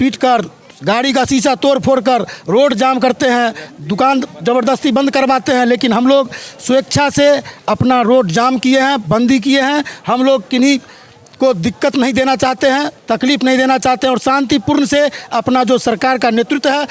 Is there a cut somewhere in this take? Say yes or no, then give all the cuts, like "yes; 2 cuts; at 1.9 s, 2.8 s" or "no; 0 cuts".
no; 0 cuts